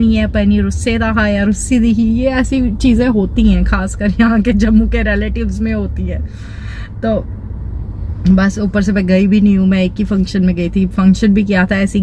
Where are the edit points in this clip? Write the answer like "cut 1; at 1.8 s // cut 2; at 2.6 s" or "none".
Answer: none